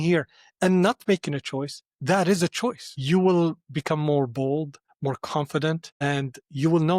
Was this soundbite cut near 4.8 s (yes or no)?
yes